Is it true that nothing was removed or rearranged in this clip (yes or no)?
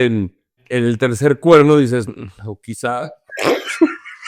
yes